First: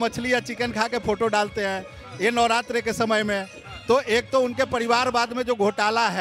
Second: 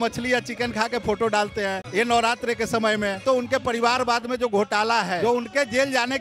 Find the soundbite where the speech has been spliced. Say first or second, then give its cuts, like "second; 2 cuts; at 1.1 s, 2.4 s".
second; 3 cuts; at 1.8 s, 3.2 s, 5.2 s